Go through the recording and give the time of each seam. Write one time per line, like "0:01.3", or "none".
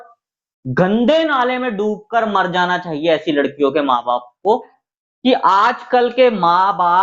0:04.8